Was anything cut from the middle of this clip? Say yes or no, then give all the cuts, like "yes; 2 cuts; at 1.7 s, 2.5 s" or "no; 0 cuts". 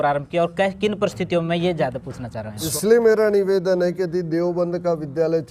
yes; 1 cut; at 2.7 s